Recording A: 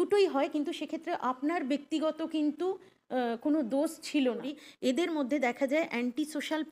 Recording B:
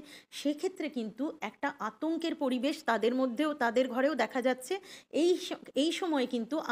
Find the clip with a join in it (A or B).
A